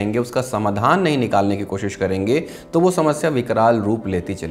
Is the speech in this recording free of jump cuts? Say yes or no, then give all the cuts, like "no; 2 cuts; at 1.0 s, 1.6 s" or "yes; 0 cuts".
yes; 0 cuts